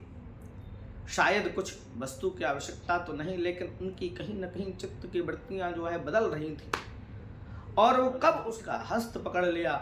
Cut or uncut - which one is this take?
cut